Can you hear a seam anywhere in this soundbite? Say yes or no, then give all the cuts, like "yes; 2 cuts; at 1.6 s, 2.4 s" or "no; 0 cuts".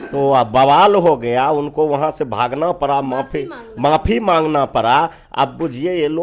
no; 0 cuts